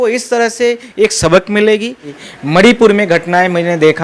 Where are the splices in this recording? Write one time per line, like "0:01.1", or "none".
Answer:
0:02.1